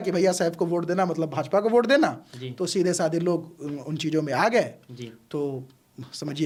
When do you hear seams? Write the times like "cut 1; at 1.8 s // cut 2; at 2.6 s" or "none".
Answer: none